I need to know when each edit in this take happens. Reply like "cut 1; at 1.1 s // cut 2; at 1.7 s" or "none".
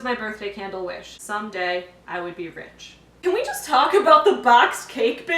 cut 1; at 1.1 s // cut 2; at 3.1 s